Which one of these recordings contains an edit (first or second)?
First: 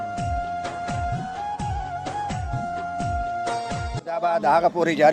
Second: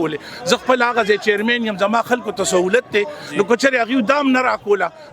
first